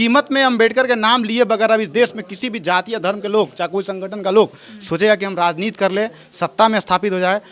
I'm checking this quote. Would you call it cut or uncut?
uncut